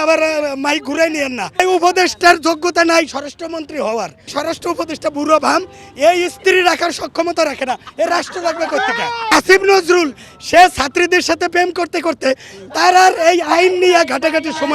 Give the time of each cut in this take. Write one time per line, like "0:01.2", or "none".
0:01.6
0:04.3
0:09.3